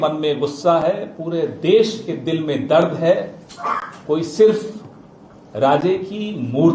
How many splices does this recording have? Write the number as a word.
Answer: zero